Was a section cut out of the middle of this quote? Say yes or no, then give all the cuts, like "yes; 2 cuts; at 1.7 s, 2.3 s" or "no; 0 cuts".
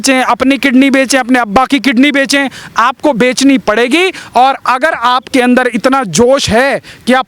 no; 0 cuts